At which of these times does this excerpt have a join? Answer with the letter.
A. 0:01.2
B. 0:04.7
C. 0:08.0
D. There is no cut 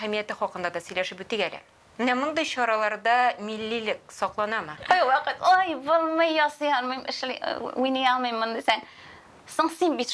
B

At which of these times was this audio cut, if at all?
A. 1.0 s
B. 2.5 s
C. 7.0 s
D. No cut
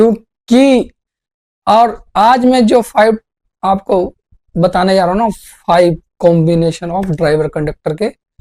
A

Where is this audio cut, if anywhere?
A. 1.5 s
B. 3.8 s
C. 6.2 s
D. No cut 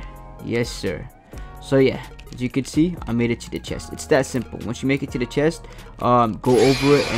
D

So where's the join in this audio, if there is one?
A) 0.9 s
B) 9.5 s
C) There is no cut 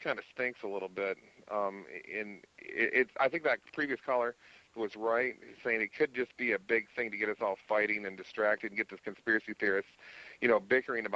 A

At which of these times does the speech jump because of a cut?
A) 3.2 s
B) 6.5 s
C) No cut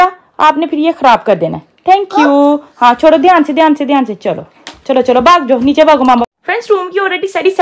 C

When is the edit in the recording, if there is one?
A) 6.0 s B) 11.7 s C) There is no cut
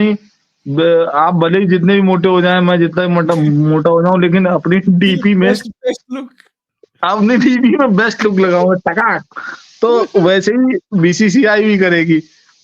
C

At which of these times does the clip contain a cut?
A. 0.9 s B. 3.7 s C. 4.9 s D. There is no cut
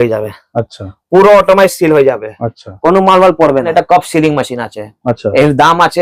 B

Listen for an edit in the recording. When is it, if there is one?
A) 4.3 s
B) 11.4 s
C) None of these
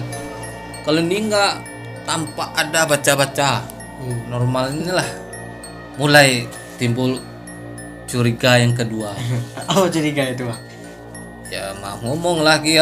A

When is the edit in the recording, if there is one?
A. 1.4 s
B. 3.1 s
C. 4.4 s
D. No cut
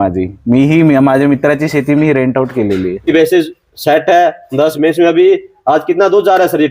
B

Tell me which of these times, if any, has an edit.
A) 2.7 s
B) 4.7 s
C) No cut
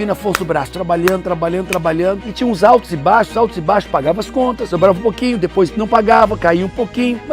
B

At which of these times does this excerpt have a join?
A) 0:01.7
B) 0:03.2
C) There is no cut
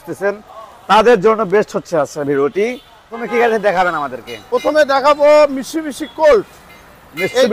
B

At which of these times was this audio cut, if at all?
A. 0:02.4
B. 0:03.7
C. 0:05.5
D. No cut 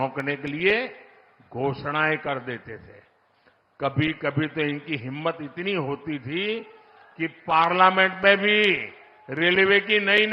D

